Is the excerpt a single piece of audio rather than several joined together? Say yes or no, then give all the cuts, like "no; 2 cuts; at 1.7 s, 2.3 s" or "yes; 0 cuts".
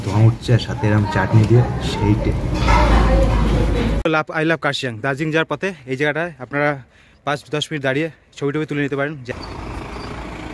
no; 2 cuts; at 4.0 s, 9.3 s